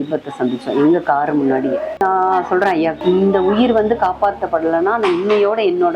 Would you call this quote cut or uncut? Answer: cut